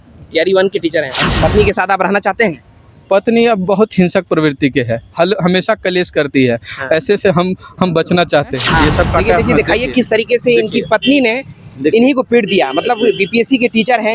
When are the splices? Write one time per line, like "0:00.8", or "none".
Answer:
0:01.1
0:08.6